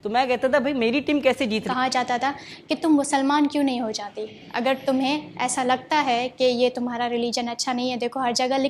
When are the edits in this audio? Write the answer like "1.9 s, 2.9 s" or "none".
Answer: 1.7 s